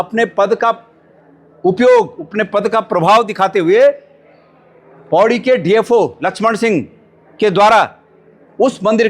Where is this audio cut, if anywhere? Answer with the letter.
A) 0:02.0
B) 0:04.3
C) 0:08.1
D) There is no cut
D